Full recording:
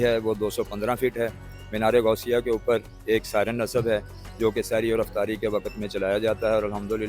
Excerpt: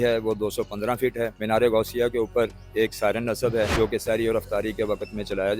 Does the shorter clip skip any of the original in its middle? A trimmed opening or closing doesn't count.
yes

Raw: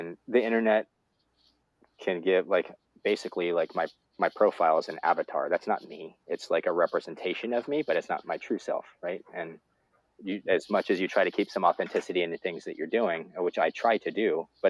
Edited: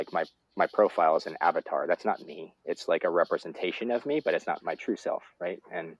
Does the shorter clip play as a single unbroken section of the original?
yes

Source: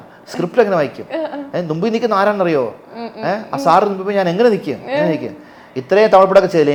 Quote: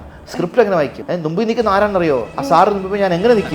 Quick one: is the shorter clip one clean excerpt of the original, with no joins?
no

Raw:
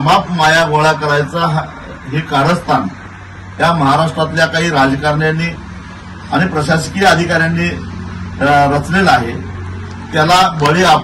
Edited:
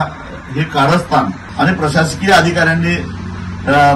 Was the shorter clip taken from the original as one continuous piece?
no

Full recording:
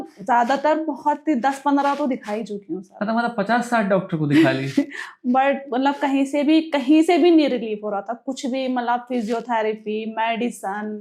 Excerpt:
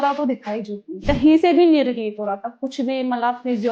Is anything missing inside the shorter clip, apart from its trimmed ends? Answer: yes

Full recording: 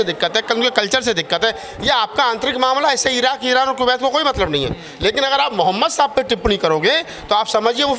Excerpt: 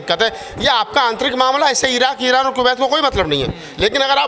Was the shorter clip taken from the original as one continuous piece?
yes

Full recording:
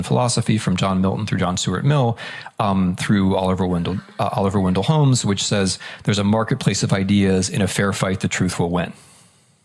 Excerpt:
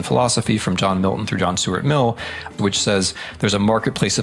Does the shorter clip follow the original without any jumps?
no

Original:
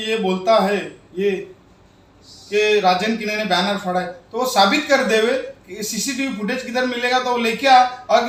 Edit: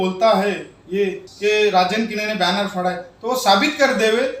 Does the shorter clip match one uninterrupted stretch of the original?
no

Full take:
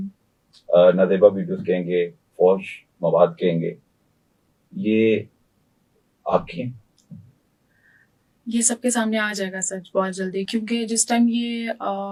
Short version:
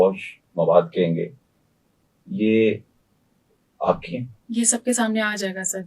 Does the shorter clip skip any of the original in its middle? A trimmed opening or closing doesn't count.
yes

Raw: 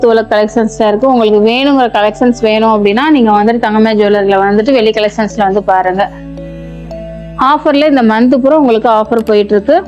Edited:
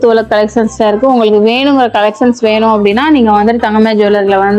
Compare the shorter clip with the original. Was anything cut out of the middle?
no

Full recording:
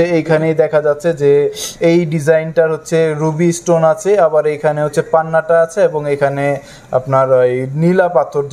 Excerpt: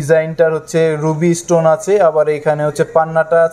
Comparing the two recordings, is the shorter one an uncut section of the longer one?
yes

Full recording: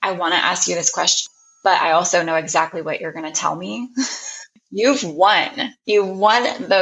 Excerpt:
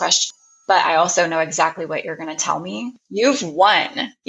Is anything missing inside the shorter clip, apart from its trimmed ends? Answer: yes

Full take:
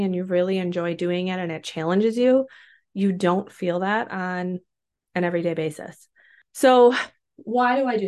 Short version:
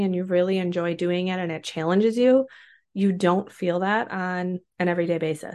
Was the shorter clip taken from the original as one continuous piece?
no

